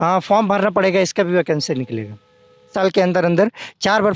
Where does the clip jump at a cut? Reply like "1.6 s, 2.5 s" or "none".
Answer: 2.7 s